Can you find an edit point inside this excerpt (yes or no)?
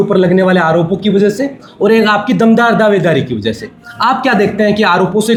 no